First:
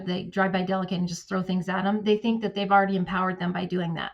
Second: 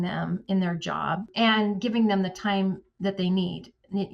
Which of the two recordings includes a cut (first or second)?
second